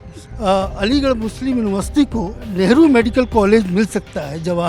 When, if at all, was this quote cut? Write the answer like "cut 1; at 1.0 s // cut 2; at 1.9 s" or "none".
cut 1; at 2.4 s